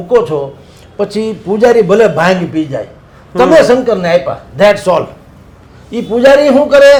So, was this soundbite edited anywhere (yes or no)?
no